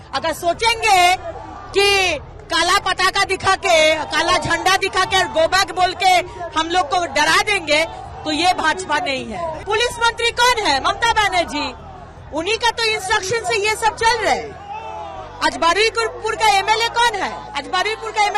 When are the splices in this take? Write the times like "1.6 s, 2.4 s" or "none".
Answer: 9.6 s